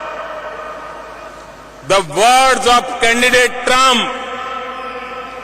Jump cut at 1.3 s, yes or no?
yes